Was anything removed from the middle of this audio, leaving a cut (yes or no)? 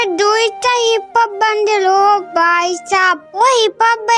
yes